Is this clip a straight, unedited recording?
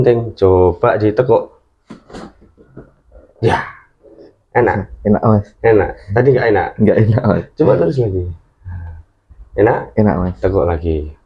yes; 0 cuts

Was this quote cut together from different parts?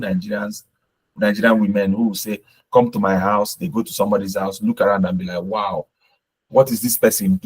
no; 0 cuts

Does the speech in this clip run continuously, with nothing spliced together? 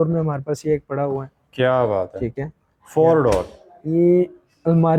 yes; 0 cuts

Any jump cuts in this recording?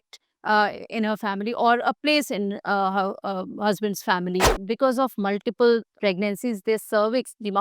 yes; 2 cuts; at 4.5 s, 5.9 s

